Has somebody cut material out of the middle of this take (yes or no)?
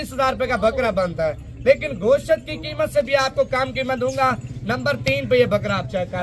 no